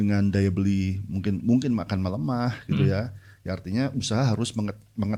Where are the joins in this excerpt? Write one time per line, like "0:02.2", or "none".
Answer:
none